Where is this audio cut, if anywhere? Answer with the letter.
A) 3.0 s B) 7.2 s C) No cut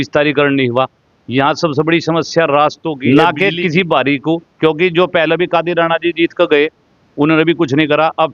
A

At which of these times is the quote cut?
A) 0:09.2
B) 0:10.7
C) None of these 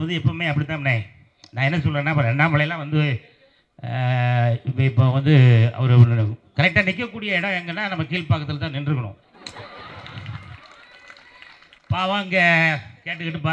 C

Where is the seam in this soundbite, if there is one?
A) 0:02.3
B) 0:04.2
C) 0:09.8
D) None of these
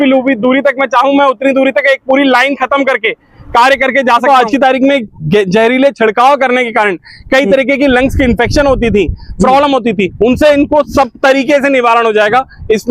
B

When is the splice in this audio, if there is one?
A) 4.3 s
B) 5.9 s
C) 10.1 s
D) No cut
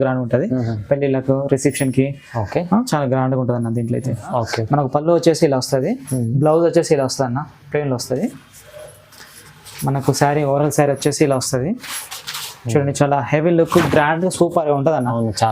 A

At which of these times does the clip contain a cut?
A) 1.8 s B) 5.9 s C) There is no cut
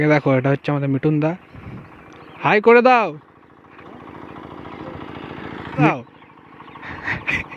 B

